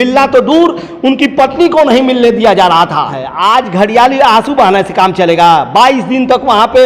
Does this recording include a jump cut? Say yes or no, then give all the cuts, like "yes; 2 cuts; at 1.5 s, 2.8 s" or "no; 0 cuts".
yes; 1 cut; at 3.2 s